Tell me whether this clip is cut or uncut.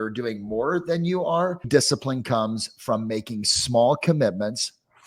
cut